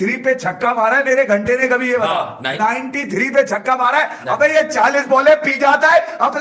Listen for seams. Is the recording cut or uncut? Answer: uncut